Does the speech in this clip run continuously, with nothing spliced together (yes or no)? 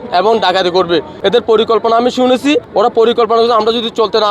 no